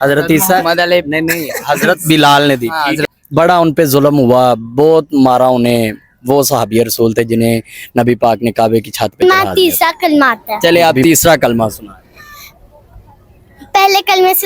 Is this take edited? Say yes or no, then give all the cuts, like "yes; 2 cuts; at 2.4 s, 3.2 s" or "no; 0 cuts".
yes; 2 cuts; at 3.0 s, 9.2 s